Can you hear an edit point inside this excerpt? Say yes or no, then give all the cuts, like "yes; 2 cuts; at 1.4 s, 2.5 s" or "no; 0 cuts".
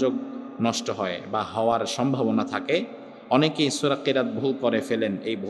no; 0 cuts